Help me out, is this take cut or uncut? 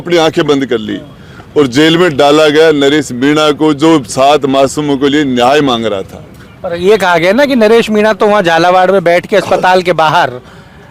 uncut